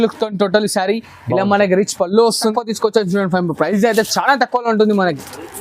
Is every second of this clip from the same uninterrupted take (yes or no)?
no